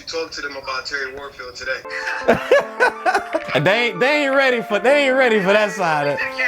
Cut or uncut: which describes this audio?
cut